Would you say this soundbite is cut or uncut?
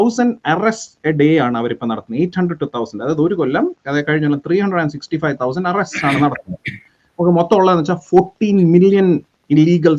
uncut